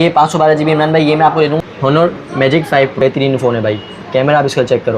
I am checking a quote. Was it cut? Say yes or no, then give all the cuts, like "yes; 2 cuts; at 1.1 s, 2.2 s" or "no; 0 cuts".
yes; 2 cuts; at 1.6 s, 3.0 s